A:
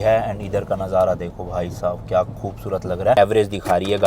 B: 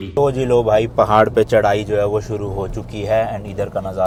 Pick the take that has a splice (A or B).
A